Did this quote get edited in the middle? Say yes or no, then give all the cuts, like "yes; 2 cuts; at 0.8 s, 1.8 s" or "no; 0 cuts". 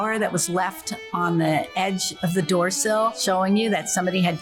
yes; 1 cut; at 3.2 s